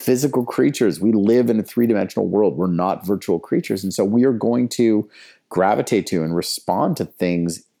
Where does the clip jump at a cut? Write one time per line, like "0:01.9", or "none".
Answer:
none